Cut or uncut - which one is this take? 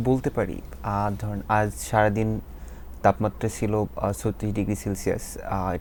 uncut